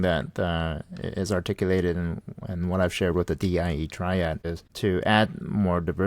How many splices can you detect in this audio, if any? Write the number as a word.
one